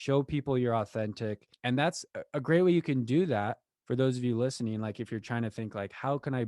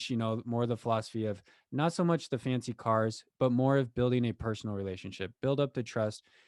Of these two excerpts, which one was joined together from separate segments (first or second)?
first